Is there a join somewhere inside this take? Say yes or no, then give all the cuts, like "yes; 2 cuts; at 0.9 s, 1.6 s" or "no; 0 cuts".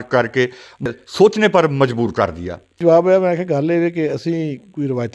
yes; 1 cut; at 2.8 s